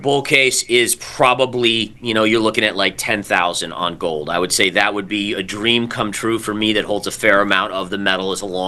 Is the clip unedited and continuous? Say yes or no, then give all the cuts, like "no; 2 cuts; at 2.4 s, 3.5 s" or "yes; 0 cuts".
yes; 0 cuts